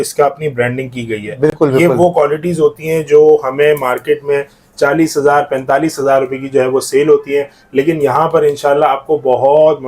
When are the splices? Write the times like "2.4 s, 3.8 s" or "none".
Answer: none